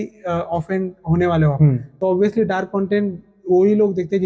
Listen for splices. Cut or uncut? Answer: cut